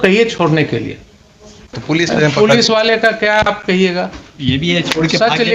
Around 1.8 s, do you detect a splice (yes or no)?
yes